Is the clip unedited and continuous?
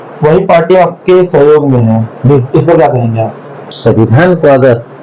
no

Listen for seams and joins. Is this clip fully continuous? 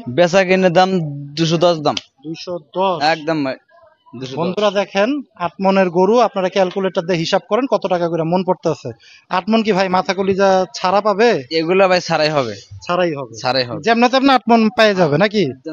yes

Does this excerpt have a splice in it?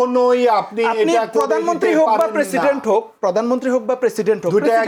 no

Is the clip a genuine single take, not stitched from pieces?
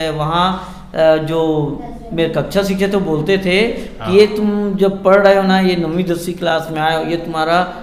yes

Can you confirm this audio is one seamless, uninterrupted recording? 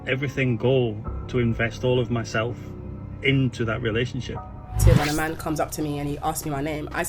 no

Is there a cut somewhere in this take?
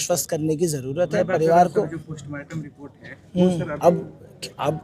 yes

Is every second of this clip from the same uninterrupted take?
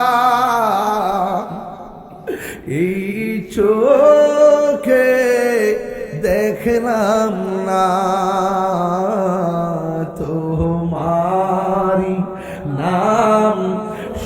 yes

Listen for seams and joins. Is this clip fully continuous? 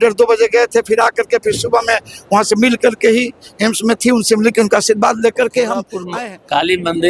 no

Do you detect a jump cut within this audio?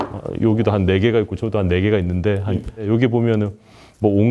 yes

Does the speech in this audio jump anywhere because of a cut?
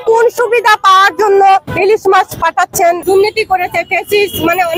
yes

